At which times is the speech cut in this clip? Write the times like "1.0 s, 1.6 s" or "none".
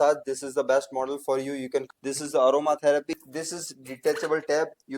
1.8 s, 3.1 s

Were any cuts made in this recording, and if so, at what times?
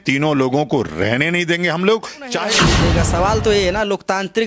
2.5 s

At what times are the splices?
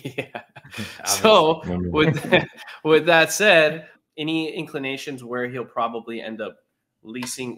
3.9 s

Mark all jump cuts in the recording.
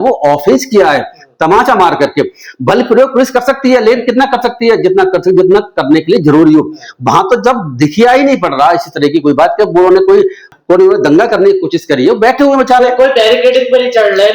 none

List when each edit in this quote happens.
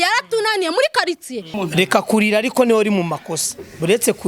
1.5 s

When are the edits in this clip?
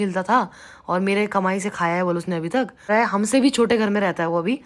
2.9 s

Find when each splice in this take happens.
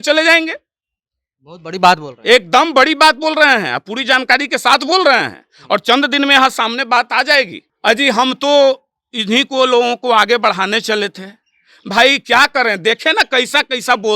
7.6 s

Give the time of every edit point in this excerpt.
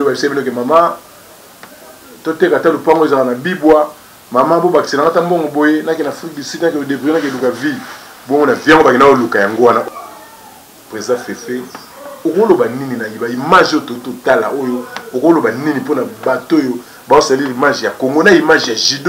9.8 s

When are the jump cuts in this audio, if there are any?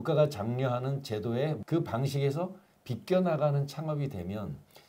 1.6 s

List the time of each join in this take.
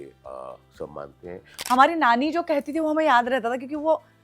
1.5 s

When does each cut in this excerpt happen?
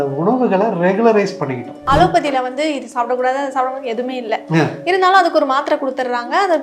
1.8 s

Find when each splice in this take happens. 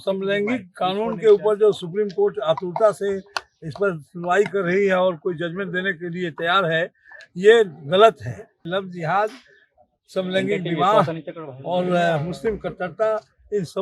8.7 s

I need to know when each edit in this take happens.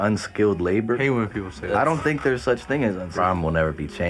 1.0 s, 3.1 s

